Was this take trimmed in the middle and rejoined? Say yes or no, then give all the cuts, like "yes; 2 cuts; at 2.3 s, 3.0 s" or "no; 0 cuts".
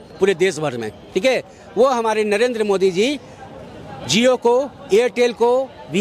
no; 0 cuts